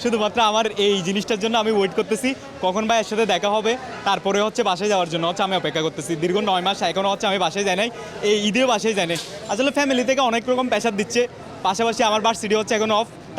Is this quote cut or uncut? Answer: uncut